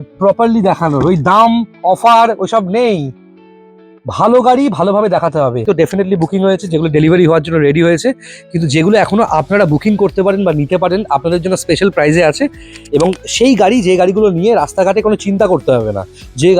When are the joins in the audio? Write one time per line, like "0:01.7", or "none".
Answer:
0:05.6

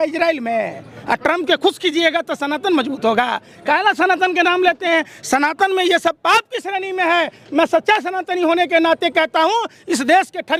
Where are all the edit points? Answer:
none

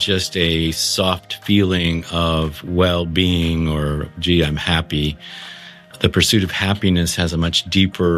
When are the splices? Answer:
none

